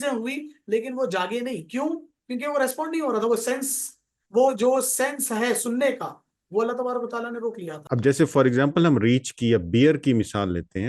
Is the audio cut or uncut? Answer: cut